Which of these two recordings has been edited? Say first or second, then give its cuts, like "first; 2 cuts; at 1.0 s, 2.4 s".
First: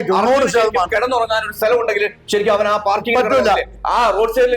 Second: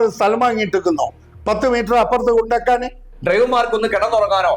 second; 1 cut; at 3.1 s